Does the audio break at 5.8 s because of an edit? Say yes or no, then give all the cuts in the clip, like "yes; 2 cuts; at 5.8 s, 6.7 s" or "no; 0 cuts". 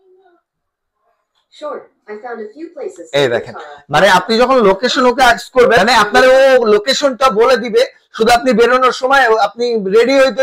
yes; 1 cut; at 5.8 s